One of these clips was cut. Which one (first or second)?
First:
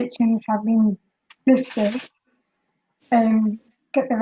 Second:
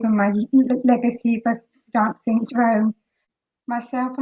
second